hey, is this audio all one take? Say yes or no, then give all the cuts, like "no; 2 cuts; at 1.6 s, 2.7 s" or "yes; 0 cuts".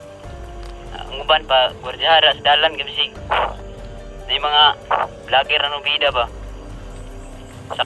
no; 1 cut; at 1.0 s